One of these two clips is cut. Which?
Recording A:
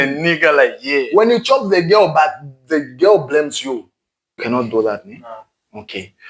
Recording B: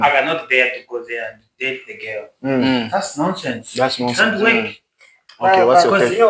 A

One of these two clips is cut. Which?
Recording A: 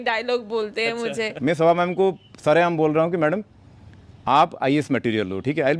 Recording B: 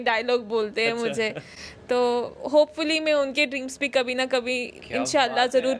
A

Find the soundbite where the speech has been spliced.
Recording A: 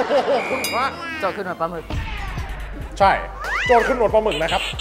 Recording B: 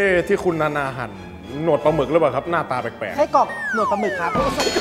A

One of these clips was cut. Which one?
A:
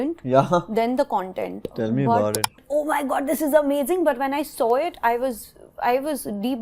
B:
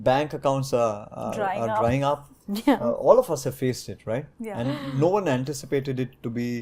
A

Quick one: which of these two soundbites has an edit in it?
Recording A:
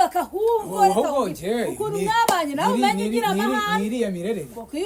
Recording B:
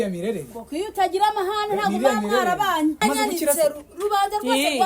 B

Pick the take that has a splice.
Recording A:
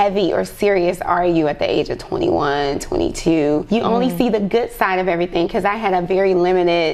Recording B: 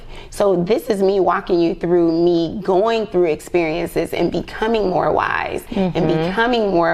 A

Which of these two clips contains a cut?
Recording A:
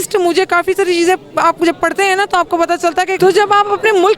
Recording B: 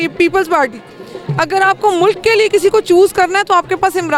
A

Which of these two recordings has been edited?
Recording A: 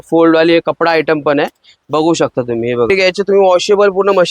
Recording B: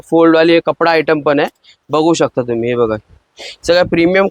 A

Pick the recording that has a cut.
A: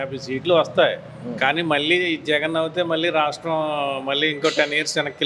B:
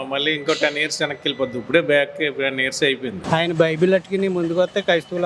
B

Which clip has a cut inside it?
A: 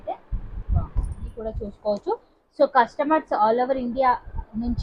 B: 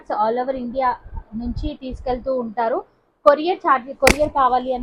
A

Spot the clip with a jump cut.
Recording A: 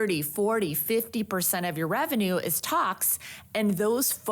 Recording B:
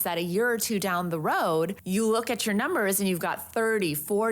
B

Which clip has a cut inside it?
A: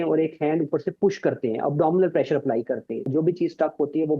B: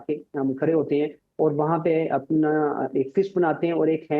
A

